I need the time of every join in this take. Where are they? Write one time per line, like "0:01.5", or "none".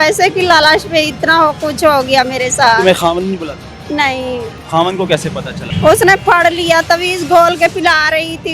0:04.6
0:05.6

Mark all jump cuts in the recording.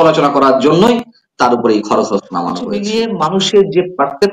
0:02.8

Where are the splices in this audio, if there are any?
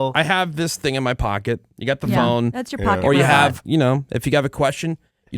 0:03.6

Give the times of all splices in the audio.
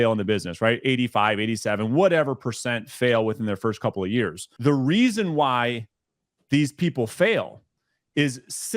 0:04.4

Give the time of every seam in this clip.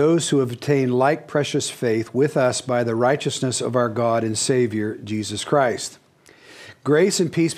0:01.5

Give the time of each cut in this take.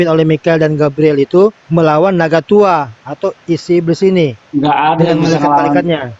0:01.6
0:04.4

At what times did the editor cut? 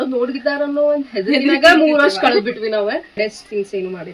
0:03.2

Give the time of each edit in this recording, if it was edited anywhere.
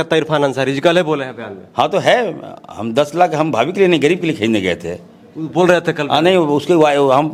none

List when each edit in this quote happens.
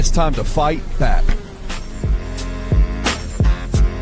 none

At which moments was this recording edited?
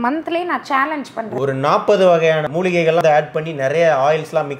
0:01.3
0:03.0

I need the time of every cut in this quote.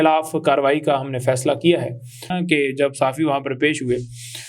0:02.3

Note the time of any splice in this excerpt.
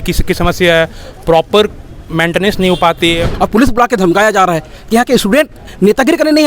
0:03.2

